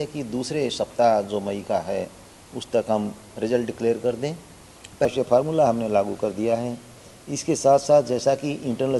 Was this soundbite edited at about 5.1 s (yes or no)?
yes